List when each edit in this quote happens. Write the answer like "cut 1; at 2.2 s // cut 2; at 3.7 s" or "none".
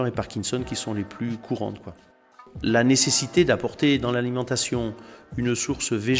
cut 1; at 2.4 s